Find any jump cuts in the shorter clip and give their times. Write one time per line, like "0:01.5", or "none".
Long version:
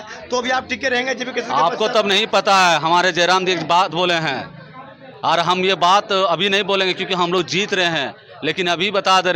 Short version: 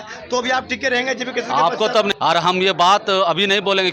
0:02.1